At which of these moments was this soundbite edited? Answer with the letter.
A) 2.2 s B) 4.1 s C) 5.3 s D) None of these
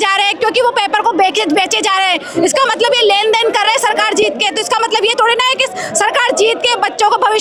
D